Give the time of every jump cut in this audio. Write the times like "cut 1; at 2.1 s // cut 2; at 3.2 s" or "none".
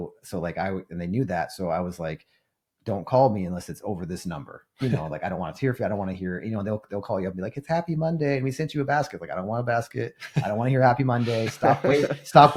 none